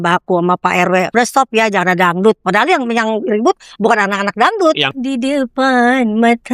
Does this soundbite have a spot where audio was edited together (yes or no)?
yes